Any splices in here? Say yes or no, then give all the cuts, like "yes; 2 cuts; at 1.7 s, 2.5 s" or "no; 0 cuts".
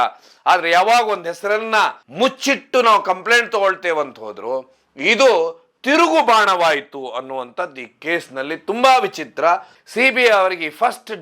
yes; 1 cut; at 9.8 s